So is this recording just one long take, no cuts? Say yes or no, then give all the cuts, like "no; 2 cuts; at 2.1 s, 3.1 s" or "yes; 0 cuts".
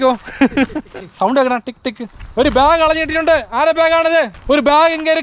no; 3 cuts; at 1.0 s, 2.1 s, 4.4 s